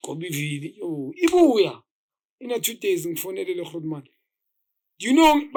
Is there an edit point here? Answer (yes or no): no